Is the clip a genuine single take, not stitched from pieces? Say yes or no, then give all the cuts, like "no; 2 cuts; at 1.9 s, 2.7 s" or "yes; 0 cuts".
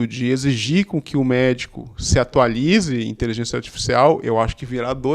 yes; 0 cuts